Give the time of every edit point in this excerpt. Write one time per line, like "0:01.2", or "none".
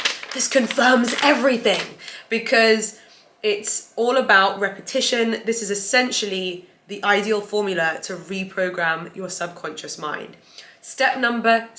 none